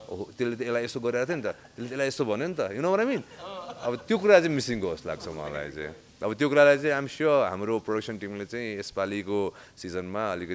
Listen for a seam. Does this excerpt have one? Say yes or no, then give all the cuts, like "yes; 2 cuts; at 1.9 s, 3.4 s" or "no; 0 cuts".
no; 0 cuts